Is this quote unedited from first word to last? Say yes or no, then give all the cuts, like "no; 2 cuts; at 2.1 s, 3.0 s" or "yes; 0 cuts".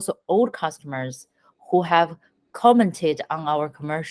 yes; 0 cuts